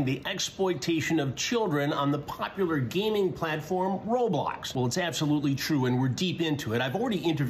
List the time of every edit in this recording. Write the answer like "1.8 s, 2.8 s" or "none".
4.6 s